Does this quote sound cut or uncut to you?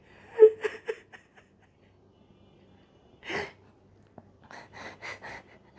uncut